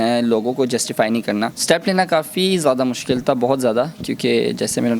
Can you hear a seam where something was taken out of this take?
yes; 1 cut; at 1.5 s

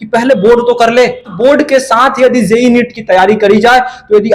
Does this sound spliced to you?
yes; 1 cut; at 1.3 s

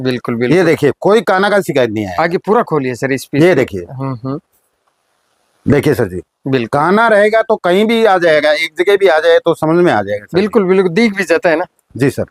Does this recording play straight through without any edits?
yes; 0 cuts

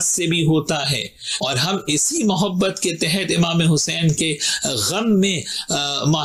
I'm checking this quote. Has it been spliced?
no; 0 cuts

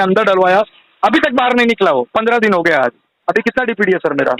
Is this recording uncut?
no; 1 cut; at 3.2 s

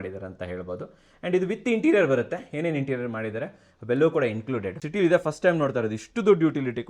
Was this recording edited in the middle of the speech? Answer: yes; 1 cut; at 4.8 s

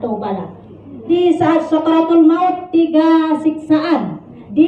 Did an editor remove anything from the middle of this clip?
yes; 1 cut; at 1.0 s

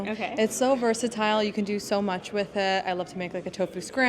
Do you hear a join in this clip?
no; 0 cuts

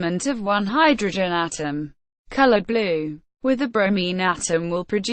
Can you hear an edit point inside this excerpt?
no; 0 cuts

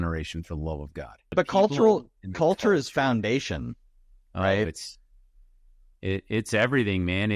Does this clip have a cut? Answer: yes; 1 cut; at 1.3 s

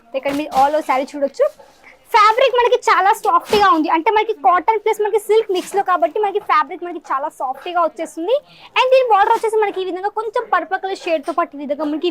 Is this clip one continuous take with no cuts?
yes; 0 cuts

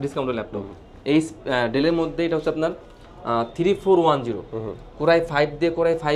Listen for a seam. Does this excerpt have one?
no; 0 cuts

